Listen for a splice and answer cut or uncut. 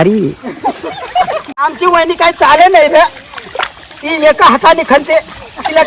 cut